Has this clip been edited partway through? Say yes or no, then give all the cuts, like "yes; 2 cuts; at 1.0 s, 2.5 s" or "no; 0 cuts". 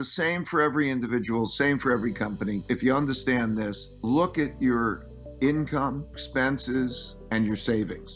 yes; 4 cuts; at 2.6 s, 3.9 s, 6.2 s, 7.1 s